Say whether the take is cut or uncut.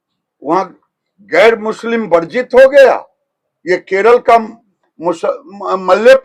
uncut